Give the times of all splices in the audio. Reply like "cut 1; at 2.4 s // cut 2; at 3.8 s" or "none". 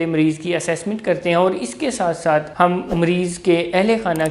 cut 1; at 2.5 s